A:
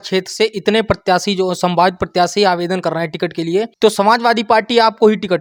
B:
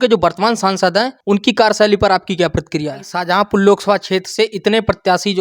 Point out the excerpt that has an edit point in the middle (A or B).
B